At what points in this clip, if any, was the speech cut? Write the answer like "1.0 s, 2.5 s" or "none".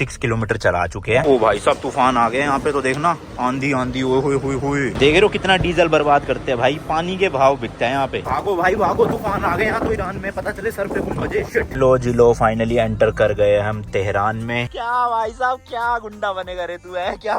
1.2 s, 4.9 s, 8.2 s, 11.7 s, 14.6 s